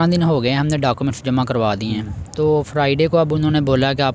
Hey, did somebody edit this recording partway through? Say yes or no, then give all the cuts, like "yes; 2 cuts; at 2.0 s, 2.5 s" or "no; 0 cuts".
no; 0 cuts